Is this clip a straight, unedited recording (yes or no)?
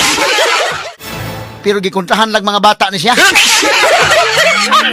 no